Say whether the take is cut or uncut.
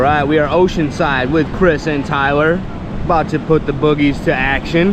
uncut